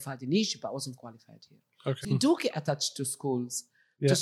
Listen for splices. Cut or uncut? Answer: cut